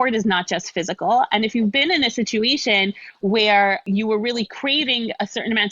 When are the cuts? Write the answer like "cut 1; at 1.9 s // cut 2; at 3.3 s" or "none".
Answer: cut 1; at 3.9 s